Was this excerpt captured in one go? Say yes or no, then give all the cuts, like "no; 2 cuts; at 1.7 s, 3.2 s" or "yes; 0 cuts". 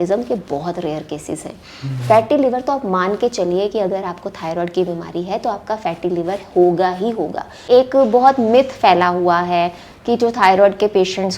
no; 1 cut; at 7.7 s